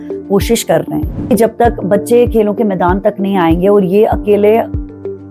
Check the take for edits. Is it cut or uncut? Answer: cut